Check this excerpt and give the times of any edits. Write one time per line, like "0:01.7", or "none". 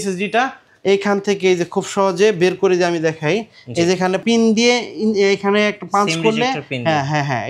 0:04.2